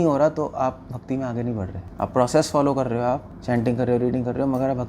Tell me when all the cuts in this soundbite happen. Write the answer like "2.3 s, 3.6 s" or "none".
1.8 s, 3.3 s